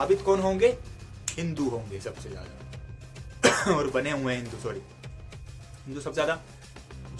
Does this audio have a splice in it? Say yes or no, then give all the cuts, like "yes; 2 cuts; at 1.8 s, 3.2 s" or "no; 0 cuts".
no; 0 cuts